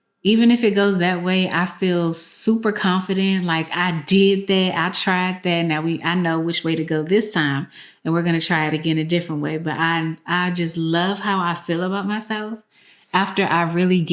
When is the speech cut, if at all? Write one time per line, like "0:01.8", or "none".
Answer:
none